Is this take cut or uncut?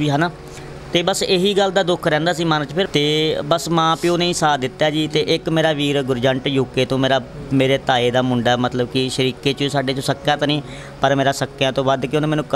cut